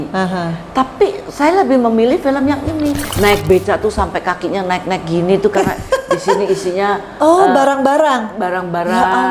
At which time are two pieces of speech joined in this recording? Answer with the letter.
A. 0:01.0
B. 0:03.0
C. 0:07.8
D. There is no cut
B